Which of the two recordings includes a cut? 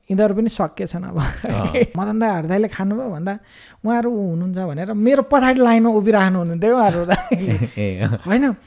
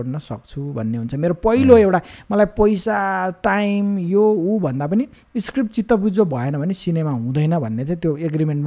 first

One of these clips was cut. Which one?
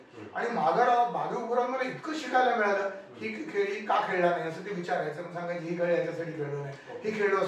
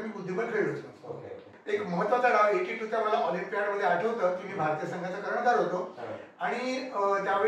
second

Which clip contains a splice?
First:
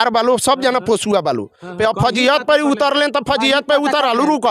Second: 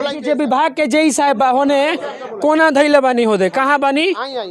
first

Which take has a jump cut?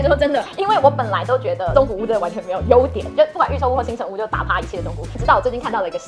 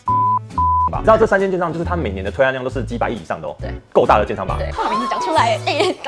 second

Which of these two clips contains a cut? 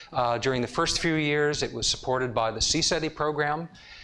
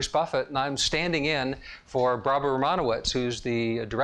first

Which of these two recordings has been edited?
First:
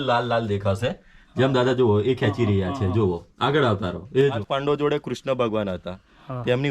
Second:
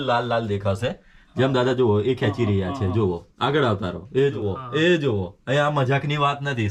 first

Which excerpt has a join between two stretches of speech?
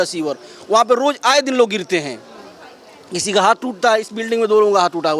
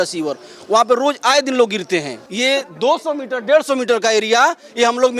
second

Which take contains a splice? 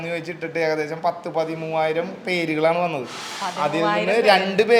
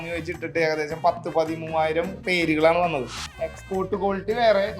second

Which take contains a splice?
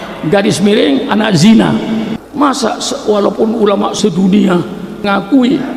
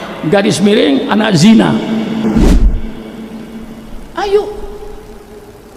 first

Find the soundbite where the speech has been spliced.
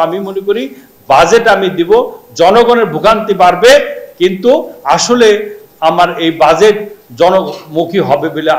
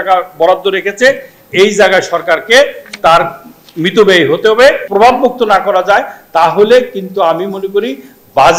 second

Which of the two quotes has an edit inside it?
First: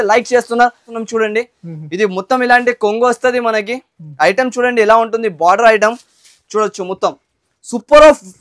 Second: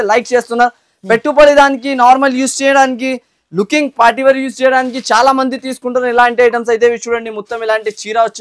first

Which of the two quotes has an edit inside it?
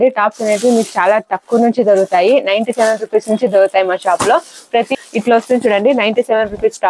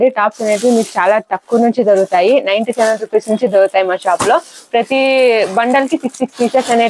first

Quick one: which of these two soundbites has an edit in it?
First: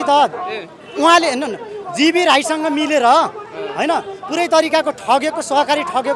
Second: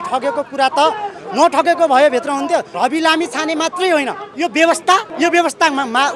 second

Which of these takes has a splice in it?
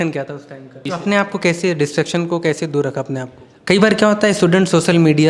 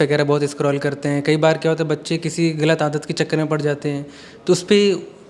first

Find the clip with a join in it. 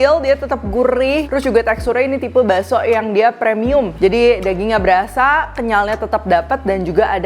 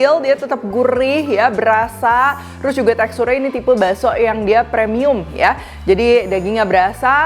first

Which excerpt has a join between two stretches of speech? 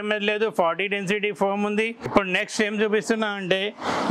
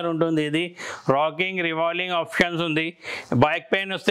first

